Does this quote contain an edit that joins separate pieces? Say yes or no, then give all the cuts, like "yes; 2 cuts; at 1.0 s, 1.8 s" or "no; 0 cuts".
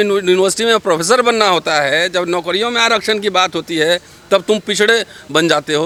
no; 0 cuts